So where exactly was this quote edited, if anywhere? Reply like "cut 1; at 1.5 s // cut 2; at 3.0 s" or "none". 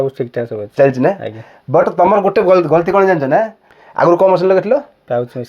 cut 1; at 3.6 s